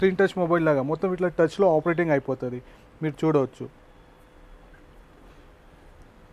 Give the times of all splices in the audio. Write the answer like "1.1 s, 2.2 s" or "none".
none

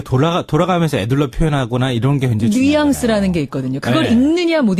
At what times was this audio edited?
none

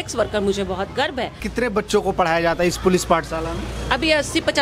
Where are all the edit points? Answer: 1.4 s

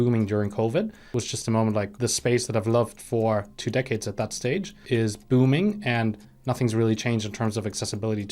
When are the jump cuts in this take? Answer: 1.0 s, 1.9 s, 4.7 s

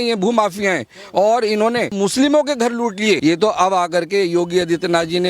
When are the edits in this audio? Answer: 1.9 s, 3.2 s

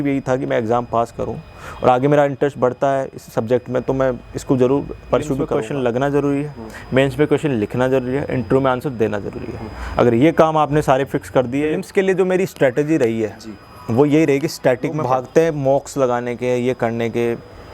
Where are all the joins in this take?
5.5 s, 11.8 s, 15.0 s

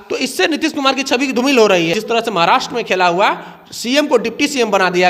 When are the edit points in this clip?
1.9 s

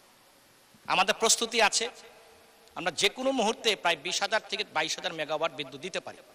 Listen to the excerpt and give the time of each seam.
none

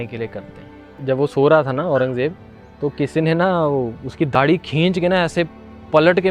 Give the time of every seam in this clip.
0.9 s, 4.3 s

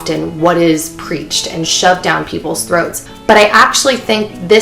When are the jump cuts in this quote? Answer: 3.0 s

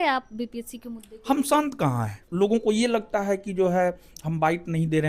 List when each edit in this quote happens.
2.2 s

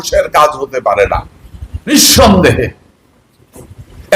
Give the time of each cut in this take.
1.9 s

